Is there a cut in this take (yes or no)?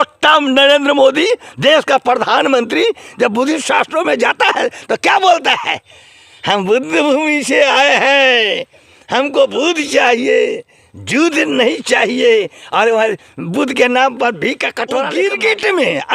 yes